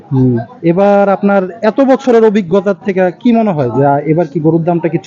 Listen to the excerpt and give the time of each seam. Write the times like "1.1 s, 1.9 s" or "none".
none